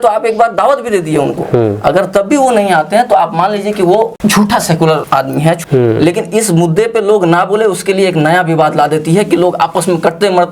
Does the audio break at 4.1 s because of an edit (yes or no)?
yes